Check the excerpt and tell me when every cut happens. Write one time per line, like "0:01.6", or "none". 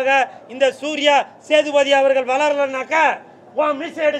none